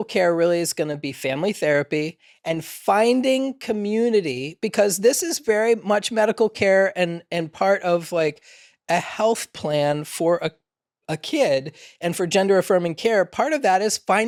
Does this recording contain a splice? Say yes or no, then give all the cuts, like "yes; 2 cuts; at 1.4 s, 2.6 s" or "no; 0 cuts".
no; 0 cuts